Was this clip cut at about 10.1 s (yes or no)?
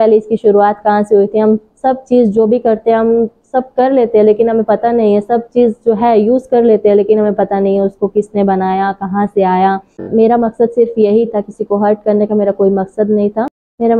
yes